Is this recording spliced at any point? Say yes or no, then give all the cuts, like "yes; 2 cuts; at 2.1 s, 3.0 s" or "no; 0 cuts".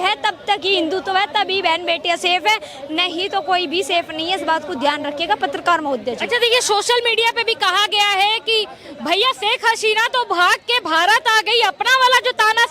no; 0 cuts